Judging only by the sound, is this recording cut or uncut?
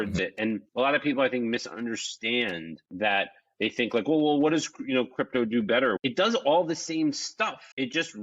cut